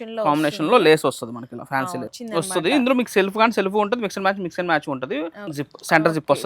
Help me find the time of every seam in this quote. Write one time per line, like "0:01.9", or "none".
0:02.1
0:05.4